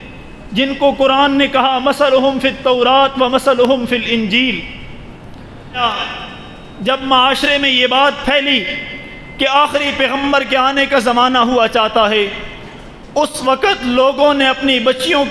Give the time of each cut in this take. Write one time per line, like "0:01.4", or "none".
0:05.8

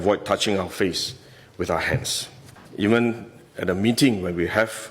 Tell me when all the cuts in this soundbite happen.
0:02.6

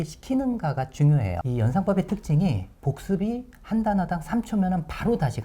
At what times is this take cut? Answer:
0:01.4

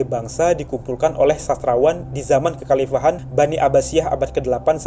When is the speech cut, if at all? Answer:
0:03.2

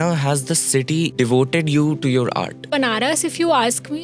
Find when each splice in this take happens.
0:01.1
0:02.7

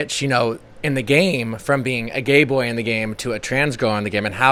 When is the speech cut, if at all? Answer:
none

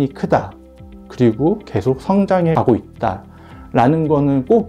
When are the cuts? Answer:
none

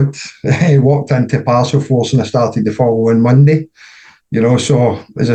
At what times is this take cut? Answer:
none

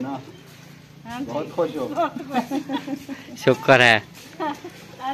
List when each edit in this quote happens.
none

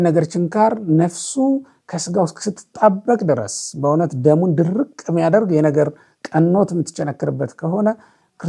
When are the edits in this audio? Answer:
none

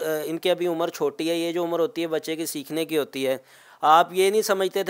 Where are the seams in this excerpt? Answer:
none

